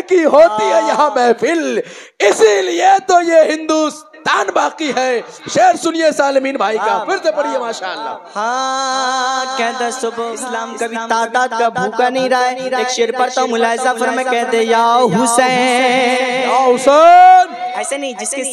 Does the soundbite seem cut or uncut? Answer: cut